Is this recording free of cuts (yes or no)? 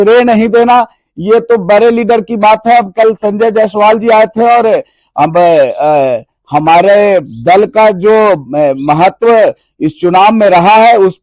yes